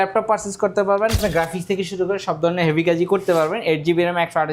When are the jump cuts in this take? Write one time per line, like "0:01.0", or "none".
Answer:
0:01.2